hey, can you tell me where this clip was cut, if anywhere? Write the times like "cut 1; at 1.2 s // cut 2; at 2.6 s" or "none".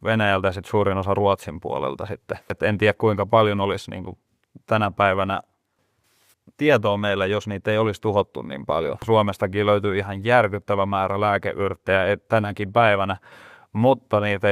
cut 1; at 2.6 s // cut 2; at 9.0 s